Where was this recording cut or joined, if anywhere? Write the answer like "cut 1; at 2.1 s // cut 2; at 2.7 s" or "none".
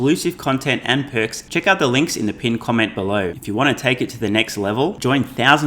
cut 1; at 1.4 s // cut 2; at 3.4 s

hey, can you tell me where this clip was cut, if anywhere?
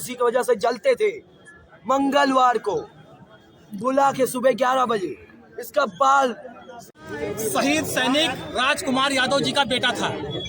cut 1; at 6.9 s

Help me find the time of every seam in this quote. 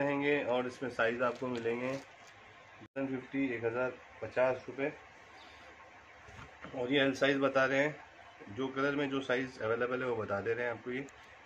cut 1; at 2.9 s

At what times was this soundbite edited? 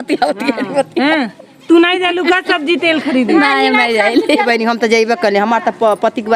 cut 1; at 4.4 s

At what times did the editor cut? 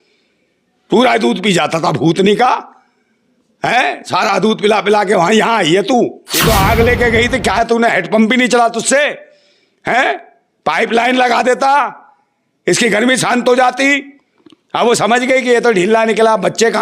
cut 1; at 6.3 s

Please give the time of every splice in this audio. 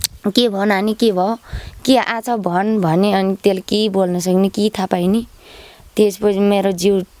none

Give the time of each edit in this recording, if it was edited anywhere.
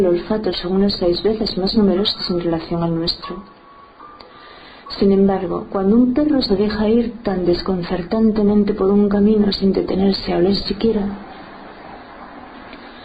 cut 1; at 7.4 s

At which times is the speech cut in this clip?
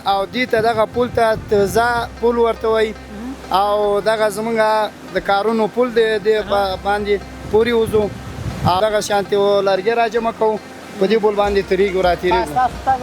cut 1; at 8.8 s

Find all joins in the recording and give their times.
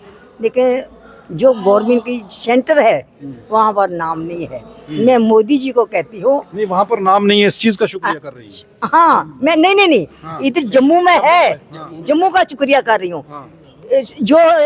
none

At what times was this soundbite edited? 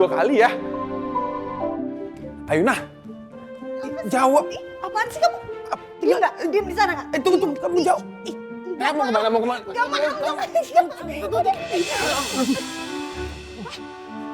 cut 1; at 2.1 s

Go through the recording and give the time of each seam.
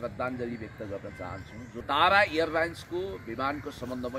cut 1; at 1.8 s

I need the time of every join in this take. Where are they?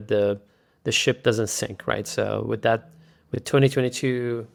none

